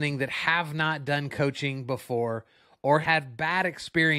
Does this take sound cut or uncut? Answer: cut